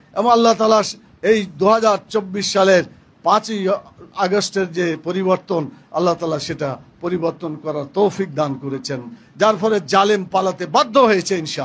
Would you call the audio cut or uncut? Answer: cut